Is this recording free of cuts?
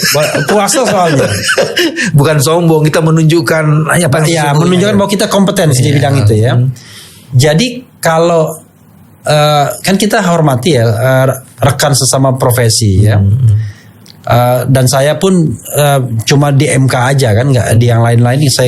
yes; 0 cuts

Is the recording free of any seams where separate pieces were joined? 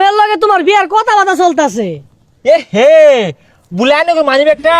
yes; 0 cuts

